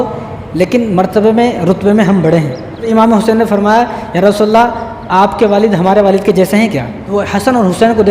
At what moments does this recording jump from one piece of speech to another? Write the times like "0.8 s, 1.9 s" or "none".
2.8 s, 7.0 s